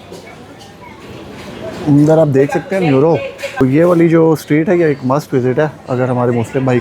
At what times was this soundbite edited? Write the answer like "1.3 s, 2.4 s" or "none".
3.6 s